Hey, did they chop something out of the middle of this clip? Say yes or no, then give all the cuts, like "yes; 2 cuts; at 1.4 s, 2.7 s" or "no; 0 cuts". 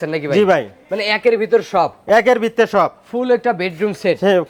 no; 0 cuts